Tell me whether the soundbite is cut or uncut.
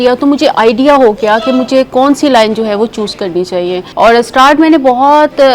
cut